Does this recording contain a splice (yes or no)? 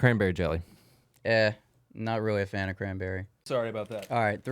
yes